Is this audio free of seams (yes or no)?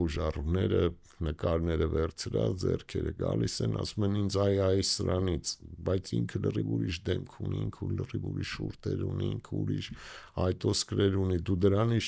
yes